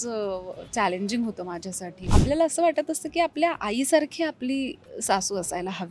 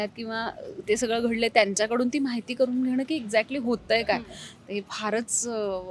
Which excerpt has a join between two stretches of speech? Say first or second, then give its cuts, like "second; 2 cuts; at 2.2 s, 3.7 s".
first; 1 cut; at 2.0 s